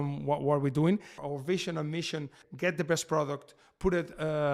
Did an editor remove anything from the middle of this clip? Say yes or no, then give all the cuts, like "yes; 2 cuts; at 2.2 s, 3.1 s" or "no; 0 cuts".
yes; 2 cuts; at 1.2 s, 2.4 s